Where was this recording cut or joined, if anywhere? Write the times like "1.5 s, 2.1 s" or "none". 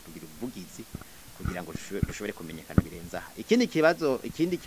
none